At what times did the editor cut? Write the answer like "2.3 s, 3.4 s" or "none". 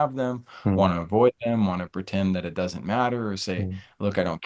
none